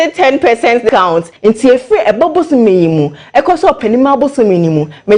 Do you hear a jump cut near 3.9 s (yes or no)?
no